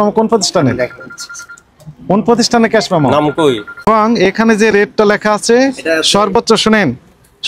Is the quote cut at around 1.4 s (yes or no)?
no